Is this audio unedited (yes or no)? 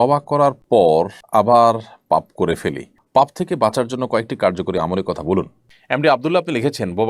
no